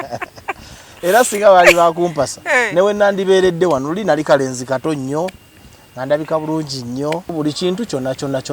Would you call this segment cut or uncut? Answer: cut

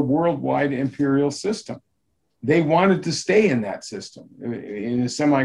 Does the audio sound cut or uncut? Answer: uncut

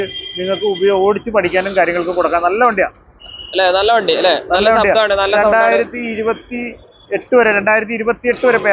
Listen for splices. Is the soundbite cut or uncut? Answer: uncut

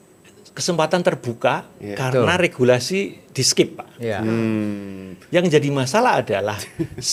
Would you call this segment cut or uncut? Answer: uncut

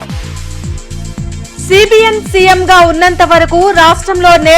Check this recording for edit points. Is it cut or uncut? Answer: uncut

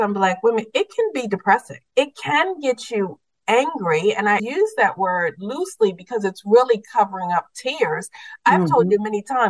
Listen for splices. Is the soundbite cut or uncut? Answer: cut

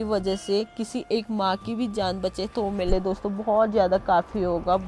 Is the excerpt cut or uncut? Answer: uncut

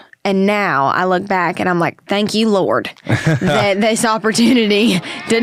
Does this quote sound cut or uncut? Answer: uncut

